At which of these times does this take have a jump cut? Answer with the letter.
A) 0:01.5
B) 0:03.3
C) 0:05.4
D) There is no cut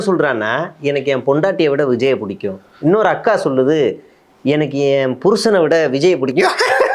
D